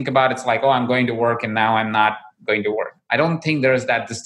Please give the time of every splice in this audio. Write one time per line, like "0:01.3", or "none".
0:03.0